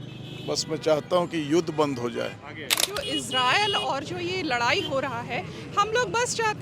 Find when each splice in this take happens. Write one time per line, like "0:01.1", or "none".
0:02.8